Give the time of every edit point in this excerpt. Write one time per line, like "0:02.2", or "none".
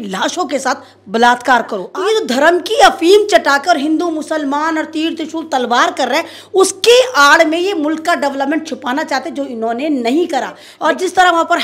0:01.8
0:10.6